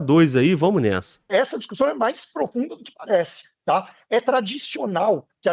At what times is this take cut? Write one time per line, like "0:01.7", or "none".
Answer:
0:01.3